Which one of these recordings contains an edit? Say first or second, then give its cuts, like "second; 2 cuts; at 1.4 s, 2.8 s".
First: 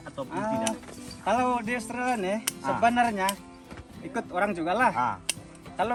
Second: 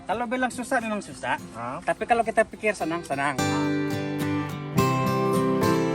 second; 1 cut; at 3.4 s